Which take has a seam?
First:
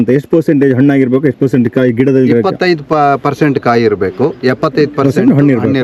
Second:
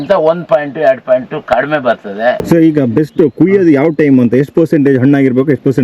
second; 1 cut; at 2.4 s

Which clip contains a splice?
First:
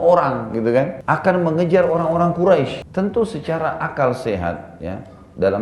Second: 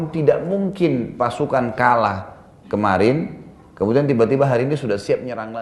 first; 2 cuts; at 1.0 s, 2.8 s

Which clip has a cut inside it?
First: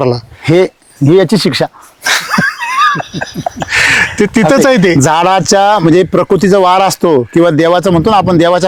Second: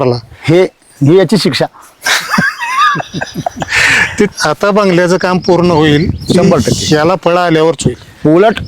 second; 1 cut; at 4.3 s

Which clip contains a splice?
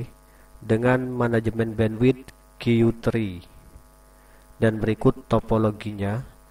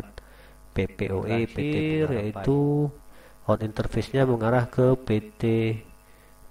second; 1 cut; at 1.6 s

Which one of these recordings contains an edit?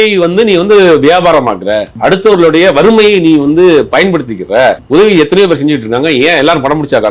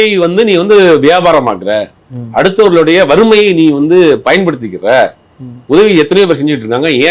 first; 2 cuts; at 1.9 s, 4.8 s

